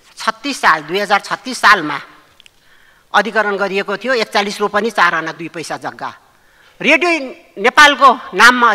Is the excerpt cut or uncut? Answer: uncut